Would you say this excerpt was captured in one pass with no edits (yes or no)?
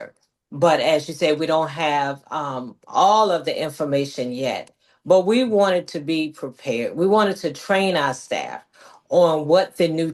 yes